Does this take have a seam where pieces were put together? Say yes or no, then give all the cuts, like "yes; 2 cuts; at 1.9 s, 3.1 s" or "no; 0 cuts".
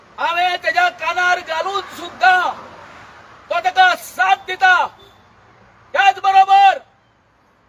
no; 0 cuts